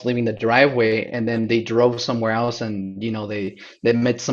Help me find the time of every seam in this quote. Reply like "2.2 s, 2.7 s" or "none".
none